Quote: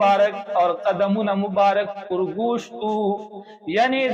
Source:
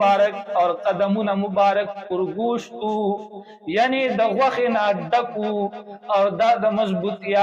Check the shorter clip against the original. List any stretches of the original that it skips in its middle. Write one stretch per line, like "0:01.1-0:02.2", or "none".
none